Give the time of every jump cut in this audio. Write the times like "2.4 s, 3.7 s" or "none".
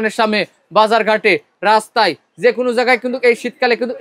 none